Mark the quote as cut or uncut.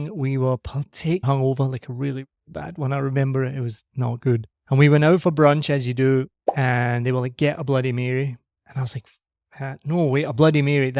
cut